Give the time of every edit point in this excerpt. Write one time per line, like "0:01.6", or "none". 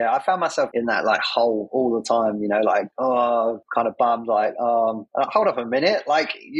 0:02.9
0:03.6
0:05.3